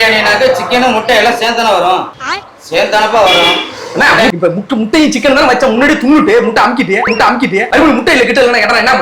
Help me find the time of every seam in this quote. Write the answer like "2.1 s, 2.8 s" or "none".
4.3 s, 7.7 s